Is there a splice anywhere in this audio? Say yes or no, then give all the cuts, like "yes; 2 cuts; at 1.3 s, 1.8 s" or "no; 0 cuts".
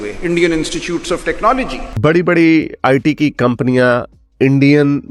yes; 1 cut; at 1.8 s